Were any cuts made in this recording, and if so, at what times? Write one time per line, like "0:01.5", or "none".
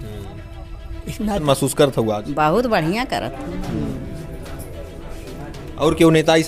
0:01.4